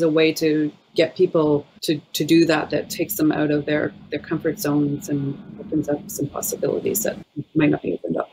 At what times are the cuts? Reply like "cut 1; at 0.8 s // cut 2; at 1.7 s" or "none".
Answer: cut 1; at 1.7 s // cut 2; at 5.5 s